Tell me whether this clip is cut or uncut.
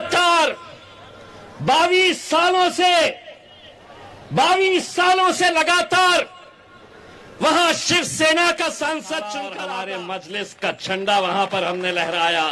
cut